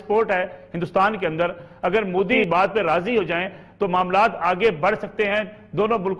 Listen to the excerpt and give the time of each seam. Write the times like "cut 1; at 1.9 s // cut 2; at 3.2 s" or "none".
cut 1; at 2.4 s